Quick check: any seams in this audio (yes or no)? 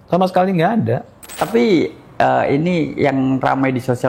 yes